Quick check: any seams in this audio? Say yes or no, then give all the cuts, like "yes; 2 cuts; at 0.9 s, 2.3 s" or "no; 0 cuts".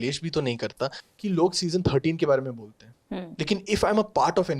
yes; 1 cut; at 1.0 s